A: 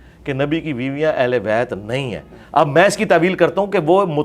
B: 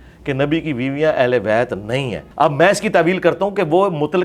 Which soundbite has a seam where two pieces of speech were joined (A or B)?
B